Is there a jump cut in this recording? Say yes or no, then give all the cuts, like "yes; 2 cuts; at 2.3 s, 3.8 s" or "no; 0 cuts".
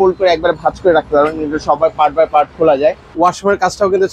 yes; 1 cut; at 3.1 s